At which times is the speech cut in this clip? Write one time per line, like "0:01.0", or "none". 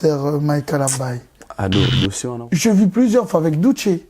0:02.2